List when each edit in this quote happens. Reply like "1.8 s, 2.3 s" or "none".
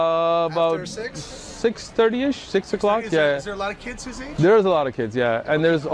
none